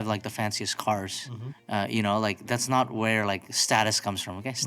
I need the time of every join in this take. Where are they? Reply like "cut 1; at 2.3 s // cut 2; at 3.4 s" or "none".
none